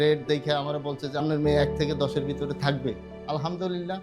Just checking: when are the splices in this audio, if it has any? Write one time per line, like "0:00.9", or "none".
0:02.9